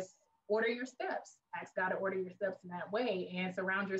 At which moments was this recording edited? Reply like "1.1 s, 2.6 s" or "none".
none